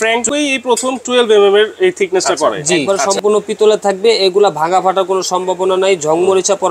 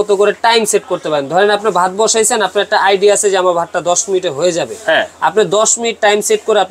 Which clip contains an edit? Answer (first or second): first